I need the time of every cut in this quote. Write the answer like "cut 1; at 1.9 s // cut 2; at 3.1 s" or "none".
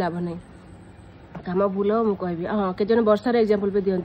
none